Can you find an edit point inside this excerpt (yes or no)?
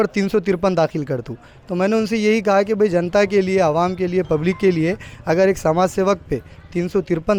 no